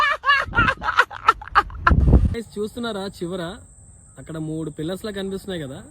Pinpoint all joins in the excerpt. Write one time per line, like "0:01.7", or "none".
0:02.3